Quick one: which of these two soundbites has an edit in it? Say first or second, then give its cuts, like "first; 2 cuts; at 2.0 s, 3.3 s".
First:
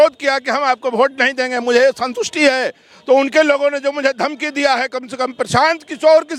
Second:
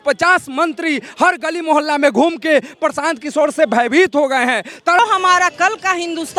second; 1 cut; at 5.0 s